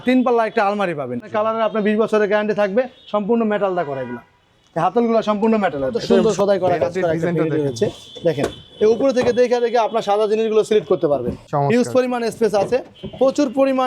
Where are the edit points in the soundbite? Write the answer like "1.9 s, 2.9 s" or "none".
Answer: 1.2 s, 6.1 s, 11.4 s